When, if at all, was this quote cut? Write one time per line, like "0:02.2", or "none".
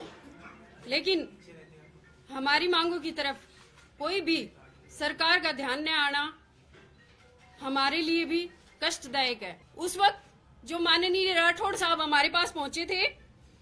0:09.6